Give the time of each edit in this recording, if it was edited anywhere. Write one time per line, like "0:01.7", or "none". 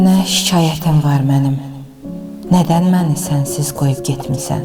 none